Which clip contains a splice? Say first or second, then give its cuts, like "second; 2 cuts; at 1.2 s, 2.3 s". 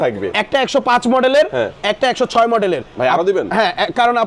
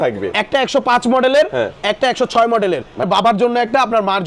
second; 1 cut; at 3.0 s